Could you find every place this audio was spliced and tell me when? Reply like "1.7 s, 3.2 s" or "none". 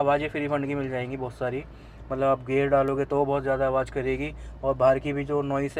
none